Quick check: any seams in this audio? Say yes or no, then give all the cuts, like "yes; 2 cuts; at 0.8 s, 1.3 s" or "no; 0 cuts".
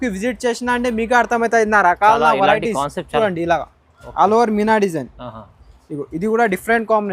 yes; 1 cut; at 3.2 s